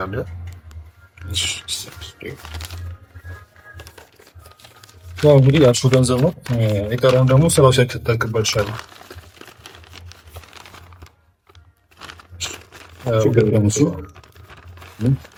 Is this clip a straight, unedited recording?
yes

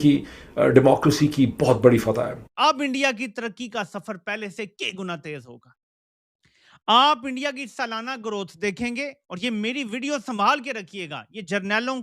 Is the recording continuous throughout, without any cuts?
no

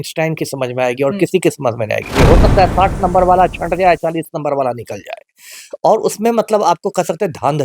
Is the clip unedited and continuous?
no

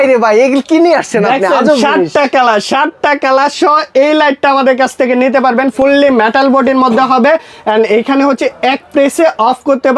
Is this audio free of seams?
yes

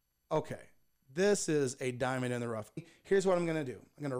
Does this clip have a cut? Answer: yes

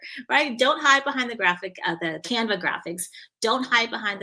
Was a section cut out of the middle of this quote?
yes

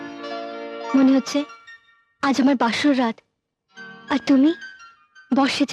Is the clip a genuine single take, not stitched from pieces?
yes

